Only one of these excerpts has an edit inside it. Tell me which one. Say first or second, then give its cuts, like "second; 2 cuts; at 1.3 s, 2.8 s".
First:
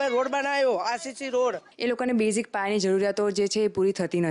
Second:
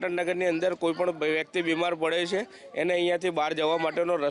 first; 1 cut; at 1.7 s